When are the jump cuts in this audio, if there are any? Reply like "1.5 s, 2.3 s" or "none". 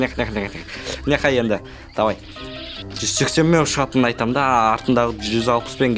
none